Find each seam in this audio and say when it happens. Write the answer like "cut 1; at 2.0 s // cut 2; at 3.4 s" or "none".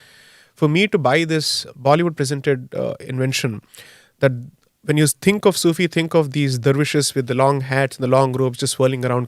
none